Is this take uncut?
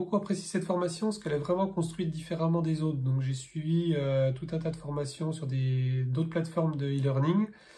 yes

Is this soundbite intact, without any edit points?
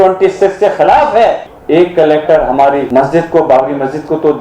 no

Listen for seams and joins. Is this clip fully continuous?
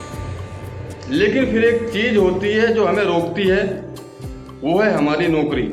yes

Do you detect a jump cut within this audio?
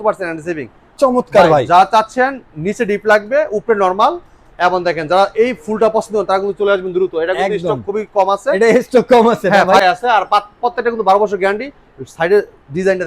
yes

